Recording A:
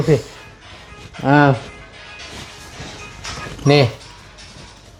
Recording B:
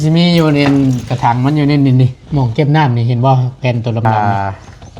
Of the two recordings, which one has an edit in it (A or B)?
B